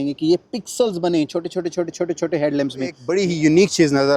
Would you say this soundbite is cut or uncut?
cut